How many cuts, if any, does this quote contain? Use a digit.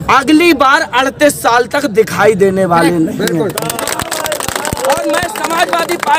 0